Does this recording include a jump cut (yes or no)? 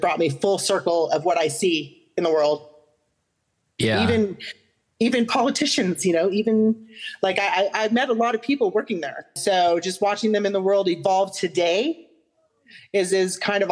yes